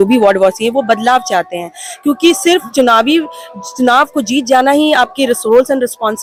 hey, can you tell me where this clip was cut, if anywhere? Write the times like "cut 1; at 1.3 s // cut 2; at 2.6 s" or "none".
none